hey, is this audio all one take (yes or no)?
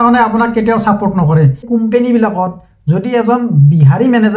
no